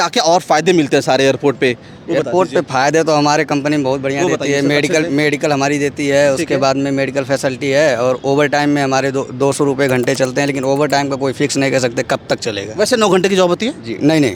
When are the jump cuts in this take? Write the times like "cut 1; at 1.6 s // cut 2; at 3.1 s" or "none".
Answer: none